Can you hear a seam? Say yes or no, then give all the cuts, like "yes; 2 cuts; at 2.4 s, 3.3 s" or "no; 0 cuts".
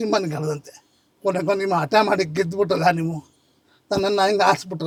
no; 0 cuts